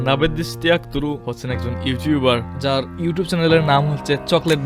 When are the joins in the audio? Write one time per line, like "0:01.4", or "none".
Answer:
0:02.8